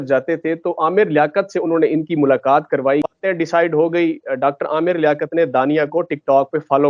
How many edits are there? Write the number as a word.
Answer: one